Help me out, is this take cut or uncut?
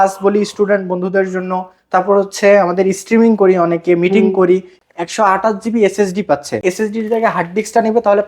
cut